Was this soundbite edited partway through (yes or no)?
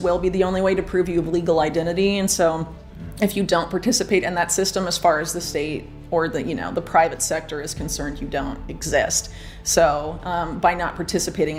no